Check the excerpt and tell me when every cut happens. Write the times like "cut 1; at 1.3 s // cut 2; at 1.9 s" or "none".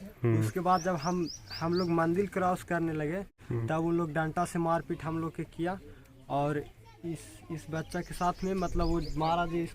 cut 1; at 3.3 s